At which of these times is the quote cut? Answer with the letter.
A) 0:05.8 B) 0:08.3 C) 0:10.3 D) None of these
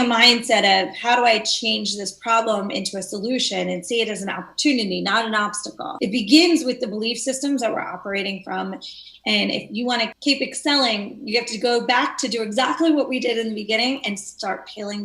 A